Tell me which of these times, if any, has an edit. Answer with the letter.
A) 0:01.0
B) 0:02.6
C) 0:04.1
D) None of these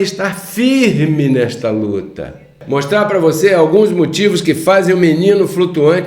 B